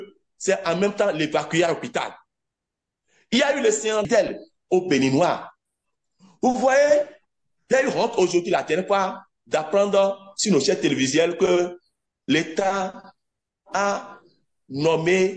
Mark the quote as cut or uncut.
cut